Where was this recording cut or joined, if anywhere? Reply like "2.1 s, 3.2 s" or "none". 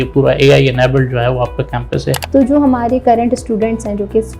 2.2 s

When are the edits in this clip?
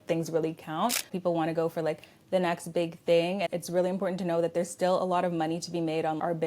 1.1 s, 3.5 s

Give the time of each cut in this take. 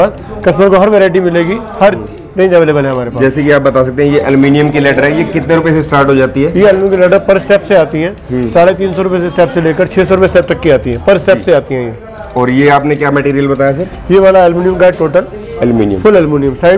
none

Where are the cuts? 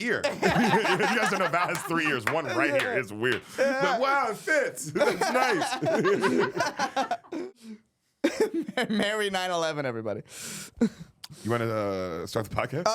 7.4 s

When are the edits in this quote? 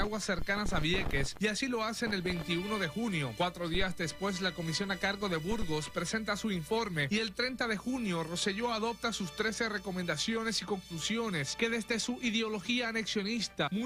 7.6 s

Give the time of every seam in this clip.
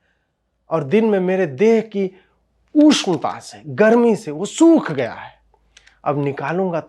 none

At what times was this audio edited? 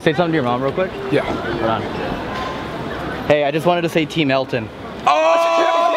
none

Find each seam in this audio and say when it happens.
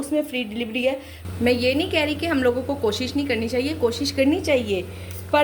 1.1 s

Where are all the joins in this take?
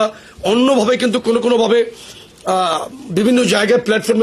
none

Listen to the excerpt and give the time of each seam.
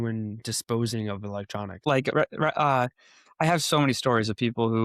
1.8 s

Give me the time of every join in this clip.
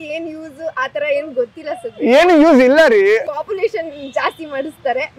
3.2 s

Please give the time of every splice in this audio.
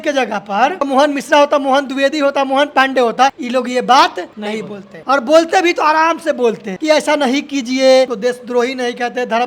0.8 s, 3.4 s, 4.5 s, 6.7 s, 8.1 s

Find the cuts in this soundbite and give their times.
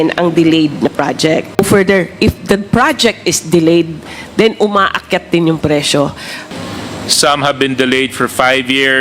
1.5 s, 6.5 s

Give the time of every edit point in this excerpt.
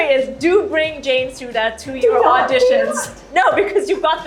none

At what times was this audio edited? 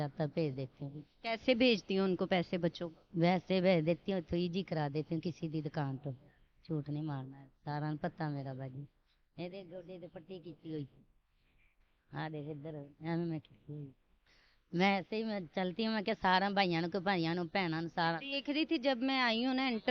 none

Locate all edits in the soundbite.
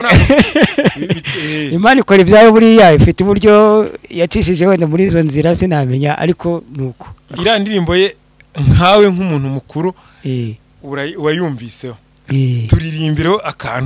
7.3 s

